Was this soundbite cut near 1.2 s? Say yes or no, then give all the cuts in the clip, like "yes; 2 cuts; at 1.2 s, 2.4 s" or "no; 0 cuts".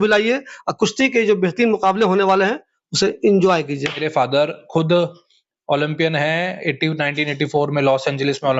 no; 1 cut; at 4.0 s